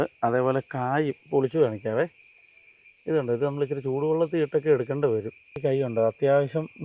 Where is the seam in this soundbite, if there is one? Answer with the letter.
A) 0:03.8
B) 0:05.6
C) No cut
B